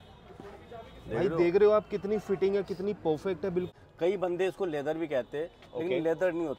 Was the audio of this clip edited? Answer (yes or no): yes